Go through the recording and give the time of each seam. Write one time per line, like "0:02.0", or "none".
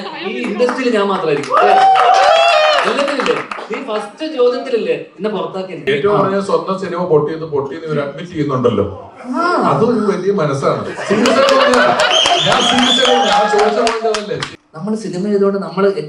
0:05.8
0:14.5